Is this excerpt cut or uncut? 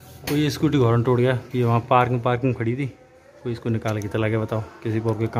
uncut